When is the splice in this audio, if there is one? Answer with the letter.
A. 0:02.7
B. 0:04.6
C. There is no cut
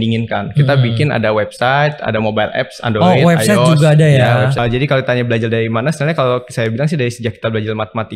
B